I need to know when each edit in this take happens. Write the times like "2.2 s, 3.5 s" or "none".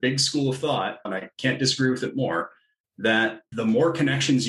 1.0 s, 3.5 s